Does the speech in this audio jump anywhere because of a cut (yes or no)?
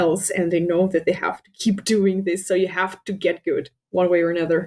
yes